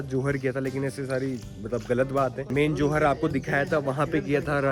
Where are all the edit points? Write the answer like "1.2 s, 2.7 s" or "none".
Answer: none